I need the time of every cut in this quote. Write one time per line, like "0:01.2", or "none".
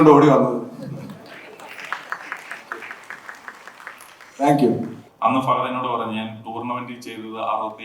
0:05.0